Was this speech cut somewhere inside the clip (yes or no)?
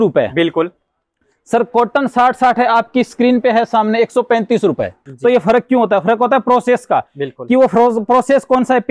yes